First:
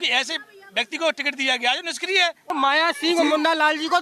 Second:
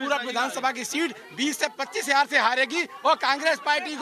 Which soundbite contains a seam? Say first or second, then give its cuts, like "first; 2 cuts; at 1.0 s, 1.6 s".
first; 1 cut; at 2.5 s